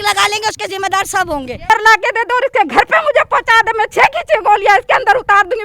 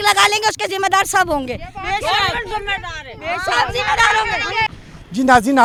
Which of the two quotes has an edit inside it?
first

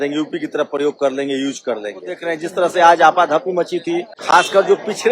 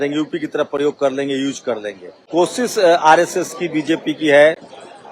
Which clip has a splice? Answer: first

